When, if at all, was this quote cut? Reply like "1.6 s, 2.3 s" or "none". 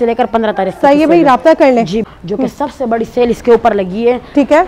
2.1 s